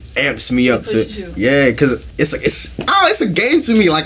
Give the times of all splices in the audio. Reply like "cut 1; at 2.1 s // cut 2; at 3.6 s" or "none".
cut 1; at 2.1 s